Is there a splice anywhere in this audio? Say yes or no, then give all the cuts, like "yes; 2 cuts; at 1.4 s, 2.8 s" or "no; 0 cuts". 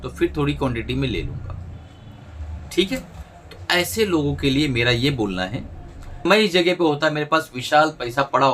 yes; 1 cut; at 6.2 s